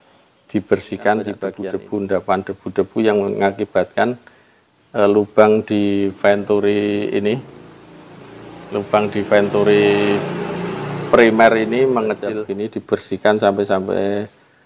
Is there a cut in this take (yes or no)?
yes